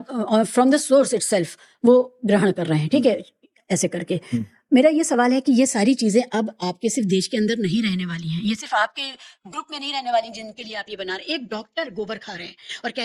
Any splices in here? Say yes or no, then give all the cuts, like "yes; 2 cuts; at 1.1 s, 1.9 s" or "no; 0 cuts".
no; 0 cuts